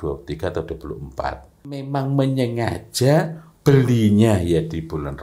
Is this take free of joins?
no; 1 cut; at 1.8 s

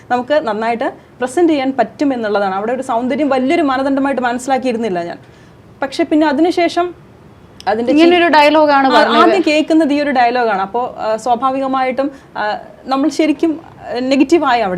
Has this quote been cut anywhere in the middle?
no; 0 cuts

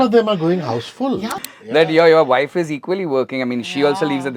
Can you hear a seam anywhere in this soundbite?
yes; 1 cut; at 1.4 s

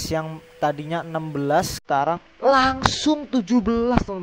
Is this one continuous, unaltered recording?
no; 1 cut; at 2.3 s

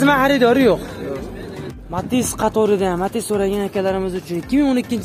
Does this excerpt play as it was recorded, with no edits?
no; 1 cut; at 1.7 s

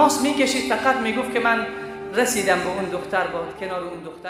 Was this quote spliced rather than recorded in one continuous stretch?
no; 0 cuts

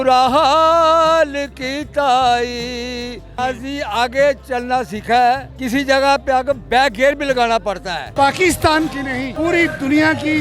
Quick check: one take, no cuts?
no; 4 cuts; at 3.4 s, 5.5 s, 8.1 s, 9.3 s

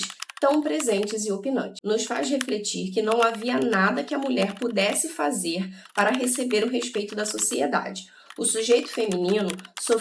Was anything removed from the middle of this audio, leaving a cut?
yes; 1 cut; at 1.7 s

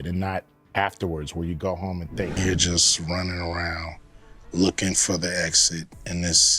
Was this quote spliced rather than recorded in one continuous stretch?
yes; 1 cut; at 2.3 s

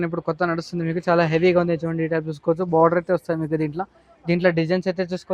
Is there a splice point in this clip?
no; 0 cuts

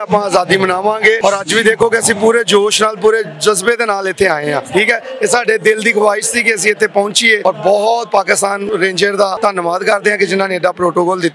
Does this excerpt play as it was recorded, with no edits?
no; 5 cuts; at 1.2 s, 4.6 s, 7.4 s, 8.6 s, 9.4 s

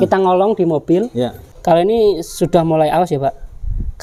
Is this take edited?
yes; 1 cut; at 1.4 s

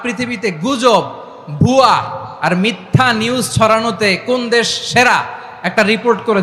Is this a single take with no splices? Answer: yes; 0 cuts

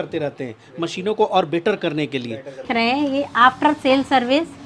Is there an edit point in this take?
yes; 1 cut; at 2.7 s

